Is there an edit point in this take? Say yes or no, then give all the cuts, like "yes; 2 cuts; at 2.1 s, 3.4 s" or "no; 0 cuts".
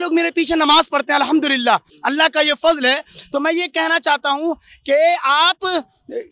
no; 0 cuts